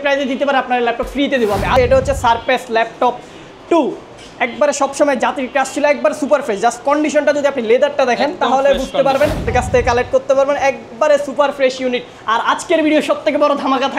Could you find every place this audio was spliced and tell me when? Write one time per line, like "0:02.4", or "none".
0:01.7
0:09.5